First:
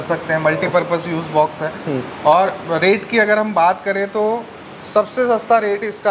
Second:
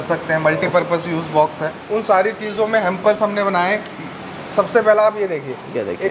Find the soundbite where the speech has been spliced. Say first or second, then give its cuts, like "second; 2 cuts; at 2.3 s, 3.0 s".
second; 1 cut; at 1.7 s